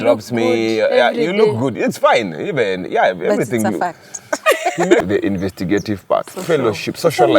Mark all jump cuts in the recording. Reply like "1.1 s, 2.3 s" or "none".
5.0 s